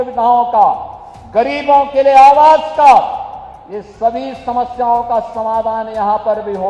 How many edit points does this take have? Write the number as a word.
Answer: zero